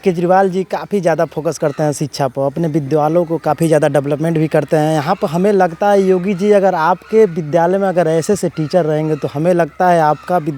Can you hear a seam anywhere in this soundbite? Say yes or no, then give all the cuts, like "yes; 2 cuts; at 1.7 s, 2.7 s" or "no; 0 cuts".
no; 0 cuts